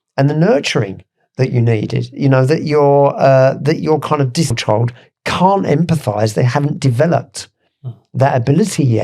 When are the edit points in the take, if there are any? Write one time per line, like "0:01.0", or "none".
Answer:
0:04.5